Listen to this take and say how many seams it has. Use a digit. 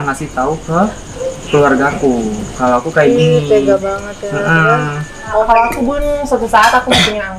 1